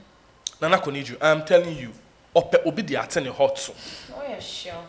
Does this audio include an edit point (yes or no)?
no